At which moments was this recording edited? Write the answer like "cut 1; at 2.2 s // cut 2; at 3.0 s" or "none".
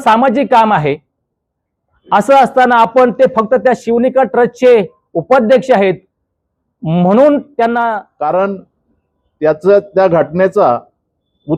cut 1; at 7.7 s